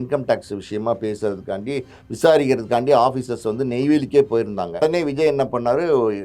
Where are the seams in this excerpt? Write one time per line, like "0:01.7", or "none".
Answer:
0:04.8